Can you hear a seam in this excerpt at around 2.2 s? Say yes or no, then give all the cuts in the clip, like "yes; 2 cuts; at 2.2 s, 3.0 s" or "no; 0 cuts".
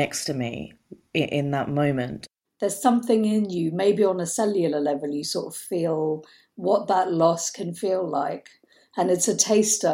yes; 1 cut; at 2.2 s